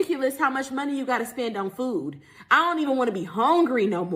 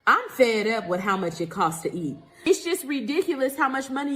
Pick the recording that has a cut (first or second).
second